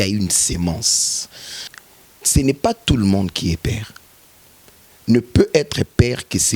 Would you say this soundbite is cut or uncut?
cut